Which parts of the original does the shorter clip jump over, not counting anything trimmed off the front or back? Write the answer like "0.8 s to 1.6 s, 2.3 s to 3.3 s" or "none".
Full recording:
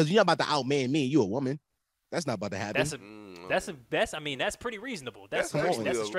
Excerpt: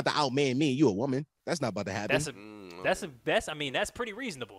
1.7 s to 2.0 s